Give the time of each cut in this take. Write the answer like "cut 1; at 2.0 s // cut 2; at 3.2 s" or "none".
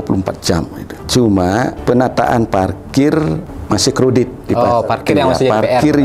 cut 1; at 1.0 s // cut 2; at 1.8 s // cut 3; at 3.5 s